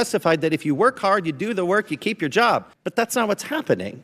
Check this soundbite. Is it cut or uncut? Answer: cut